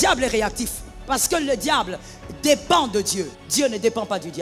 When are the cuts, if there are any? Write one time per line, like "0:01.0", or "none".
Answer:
0:03.4